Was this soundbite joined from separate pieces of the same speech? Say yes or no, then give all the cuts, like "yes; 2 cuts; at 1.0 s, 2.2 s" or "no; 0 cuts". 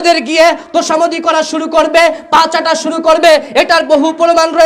no; 0 cuts